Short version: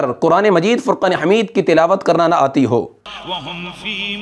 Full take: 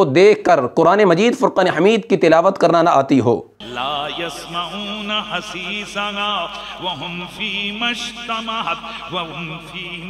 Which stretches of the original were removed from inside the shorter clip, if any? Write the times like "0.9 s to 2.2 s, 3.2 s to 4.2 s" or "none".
3.6 s to 6.6 s